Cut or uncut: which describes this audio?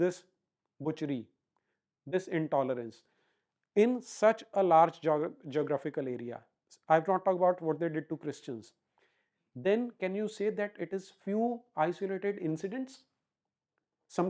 uncut